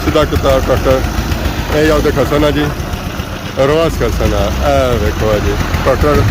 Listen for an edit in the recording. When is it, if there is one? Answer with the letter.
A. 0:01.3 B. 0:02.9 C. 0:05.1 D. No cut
D